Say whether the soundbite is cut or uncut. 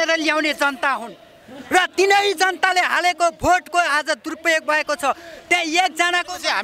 uncut